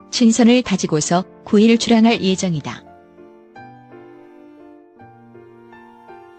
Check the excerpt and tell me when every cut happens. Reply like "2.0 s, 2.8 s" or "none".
none